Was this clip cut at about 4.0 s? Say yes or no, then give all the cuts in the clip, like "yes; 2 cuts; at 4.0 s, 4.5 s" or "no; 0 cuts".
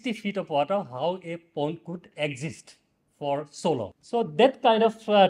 yes; 1 cut; at 4.0 s